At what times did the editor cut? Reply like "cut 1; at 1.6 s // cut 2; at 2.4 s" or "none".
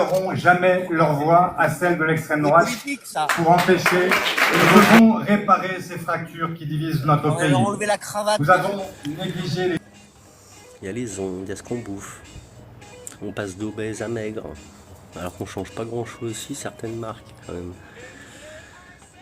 cut 1; at 4.7 s // cut 2; at 9.8 s